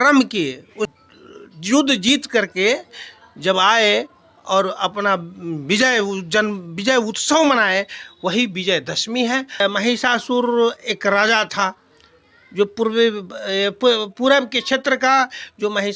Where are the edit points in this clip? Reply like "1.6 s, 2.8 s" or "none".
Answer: 1.0 s, 9.6 s